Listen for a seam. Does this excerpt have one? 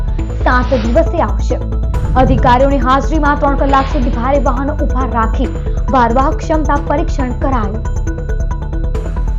no; 0 cuts

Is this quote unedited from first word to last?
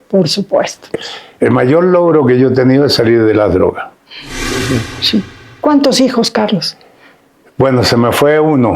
no; 2 cuts; at 0.9 s, 4.6 s

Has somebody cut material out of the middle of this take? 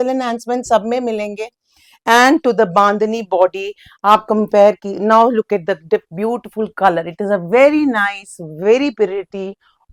no; 0 cuts

